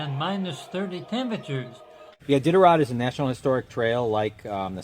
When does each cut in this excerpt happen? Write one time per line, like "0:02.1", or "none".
0:02.1